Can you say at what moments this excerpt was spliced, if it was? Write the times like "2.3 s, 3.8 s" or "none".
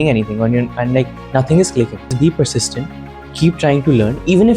2.1 s